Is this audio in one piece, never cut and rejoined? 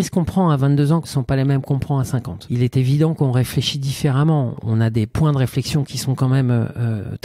no; 3 cuts; at 1.1 s, 2.4 s, 4.6 s

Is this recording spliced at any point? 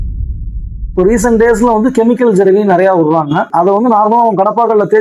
yes; 2 cuts; at 0.9 s, 3.5 s

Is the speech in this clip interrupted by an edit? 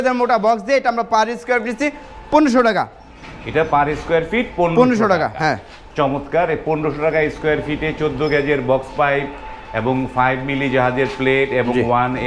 no; 0 cuts

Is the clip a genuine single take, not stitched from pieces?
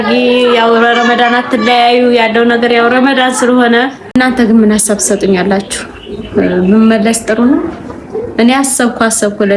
no; 1 cut; at 4.1 s

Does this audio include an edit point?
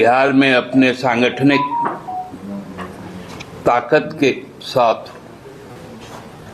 no; 0 cuts

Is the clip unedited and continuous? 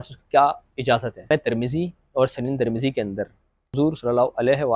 no; 1 cut; at 1.3 s

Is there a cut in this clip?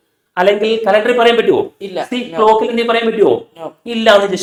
no; 0 cuts

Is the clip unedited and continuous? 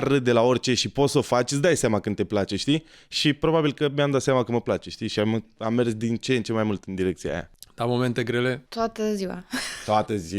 no; 2 cuts; at 7.6 s, 8.7 s

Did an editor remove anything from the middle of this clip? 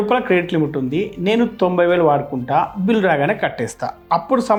no; 0 cuts

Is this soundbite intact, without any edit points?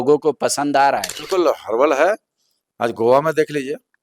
no; 1 cut; at 1.2 s

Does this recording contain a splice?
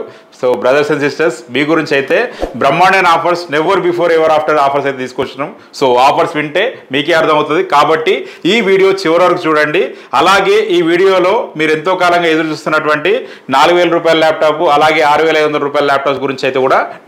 no; 0 cuts

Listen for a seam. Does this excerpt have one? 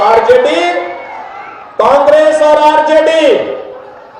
no; 0 cuts

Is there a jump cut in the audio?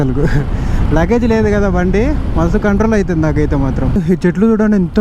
yes; 1 cut; at 3.9 s

